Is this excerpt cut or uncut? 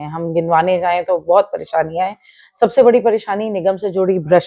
uncut